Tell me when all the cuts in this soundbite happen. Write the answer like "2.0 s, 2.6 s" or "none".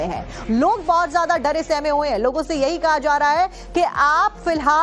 none